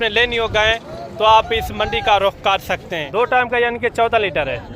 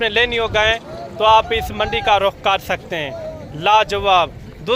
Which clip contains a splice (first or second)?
first